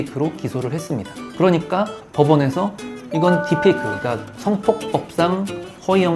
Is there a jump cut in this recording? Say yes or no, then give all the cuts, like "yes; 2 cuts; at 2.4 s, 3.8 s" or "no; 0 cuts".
no; 0 cuts